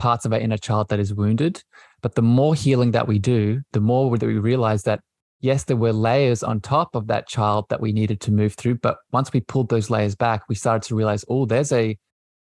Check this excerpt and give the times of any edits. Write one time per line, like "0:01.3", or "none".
0:03.7